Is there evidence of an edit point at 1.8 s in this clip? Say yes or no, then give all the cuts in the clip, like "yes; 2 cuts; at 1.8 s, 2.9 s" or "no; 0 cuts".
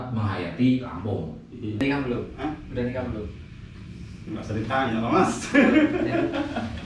yes; 1 cut; at 1.8 s